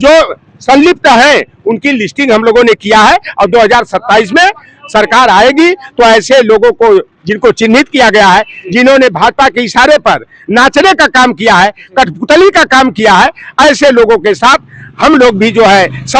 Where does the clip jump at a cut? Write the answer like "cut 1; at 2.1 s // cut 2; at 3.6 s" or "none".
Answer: none